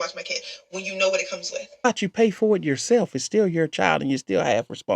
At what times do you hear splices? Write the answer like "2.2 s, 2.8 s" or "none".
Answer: 1.9 s